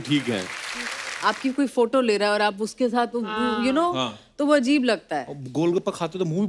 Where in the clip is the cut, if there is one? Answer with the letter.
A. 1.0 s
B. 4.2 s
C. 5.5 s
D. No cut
A